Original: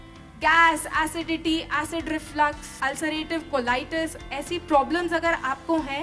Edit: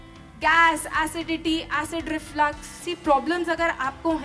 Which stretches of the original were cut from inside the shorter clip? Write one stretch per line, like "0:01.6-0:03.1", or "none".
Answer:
0:02.7-0:04.3